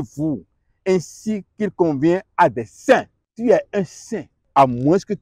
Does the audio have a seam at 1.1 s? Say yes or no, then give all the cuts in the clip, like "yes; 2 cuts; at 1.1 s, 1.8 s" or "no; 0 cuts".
no; 2 cuts; at 3.2 s, 4.4 s